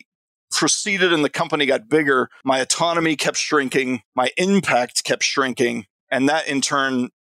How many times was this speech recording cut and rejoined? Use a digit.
2